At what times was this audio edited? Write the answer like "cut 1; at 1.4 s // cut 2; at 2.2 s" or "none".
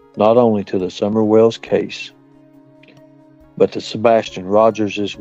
cut 1; at 2.0 s // cut 2; at 3.5 s